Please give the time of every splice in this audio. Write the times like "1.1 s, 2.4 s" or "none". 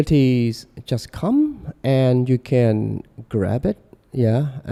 none

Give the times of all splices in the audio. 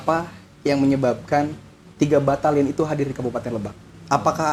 none

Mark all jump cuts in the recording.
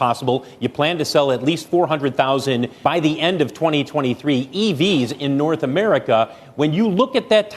2.7 s

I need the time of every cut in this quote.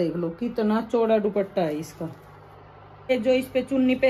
3.1 s

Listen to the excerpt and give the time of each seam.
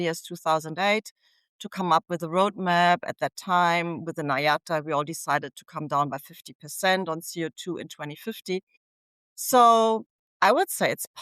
10.1 s

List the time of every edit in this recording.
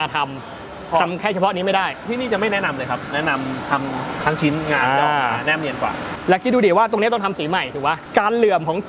2.0 s, 3.1 s, 4.2 s, 6.1 s, 8.0 s

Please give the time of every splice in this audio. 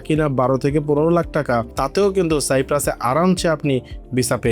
1.7 s

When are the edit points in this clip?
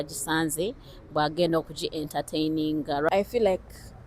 3.1 s

